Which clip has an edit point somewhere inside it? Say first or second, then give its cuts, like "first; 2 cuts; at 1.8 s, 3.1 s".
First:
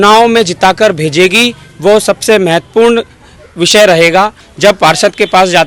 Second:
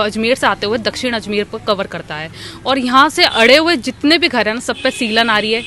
first; 1 cut; at 4.4 s